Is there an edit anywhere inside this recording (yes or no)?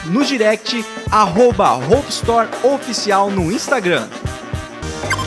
no